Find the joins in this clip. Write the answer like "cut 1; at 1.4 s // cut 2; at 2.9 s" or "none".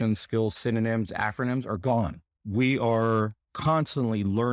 cut 1; at 2.3 s

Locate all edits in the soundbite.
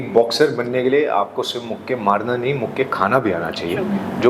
none

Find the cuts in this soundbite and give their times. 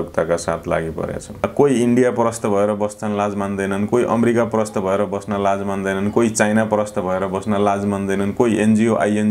cut 1; at 1.3 s

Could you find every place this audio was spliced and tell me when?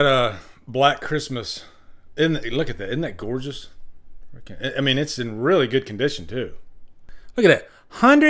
cut 1; at 6.9 s

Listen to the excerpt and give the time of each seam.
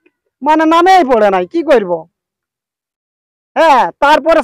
none

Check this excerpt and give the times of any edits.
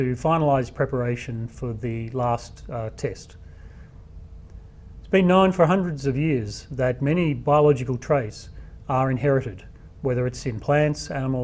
none

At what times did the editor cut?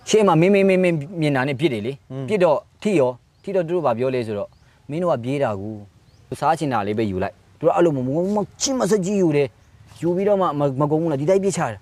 cut 1; at 6.3 s

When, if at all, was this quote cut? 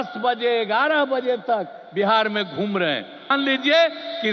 cut 1; at 3.3 s

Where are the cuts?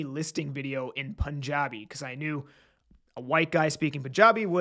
none

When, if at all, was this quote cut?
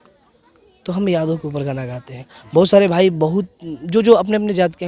none

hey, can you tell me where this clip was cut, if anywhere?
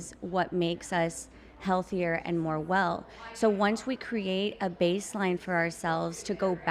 none

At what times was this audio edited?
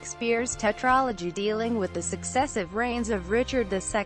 none

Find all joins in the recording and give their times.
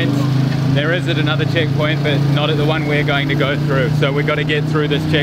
none

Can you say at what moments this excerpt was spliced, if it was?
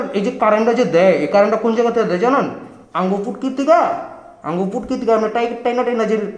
none

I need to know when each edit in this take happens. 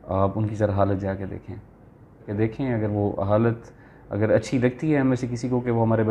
none

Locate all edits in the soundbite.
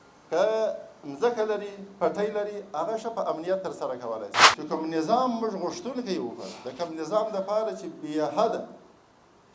cut 1; at 4.4 s

